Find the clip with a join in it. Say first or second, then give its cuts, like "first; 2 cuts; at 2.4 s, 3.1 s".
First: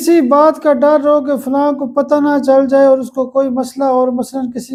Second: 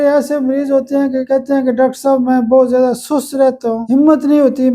second; 2 cuts; at 1.2 s, 3.8 s